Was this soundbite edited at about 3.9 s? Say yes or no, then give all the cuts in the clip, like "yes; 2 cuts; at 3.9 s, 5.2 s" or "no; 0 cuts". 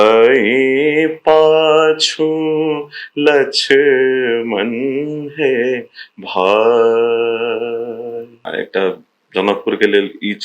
no; 1 cut; at 8.5 s